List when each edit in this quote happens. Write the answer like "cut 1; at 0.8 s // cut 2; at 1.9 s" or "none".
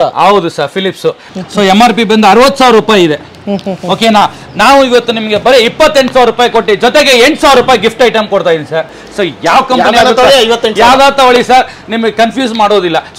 cut 1; at 1.3 s // cut 2; at 9.0 s